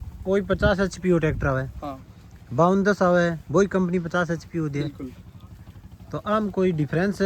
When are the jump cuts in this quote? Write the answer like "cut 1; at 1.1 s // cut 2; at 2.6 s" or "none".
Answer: none